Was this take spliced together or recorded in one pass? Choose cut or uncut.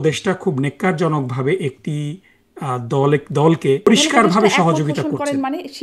cut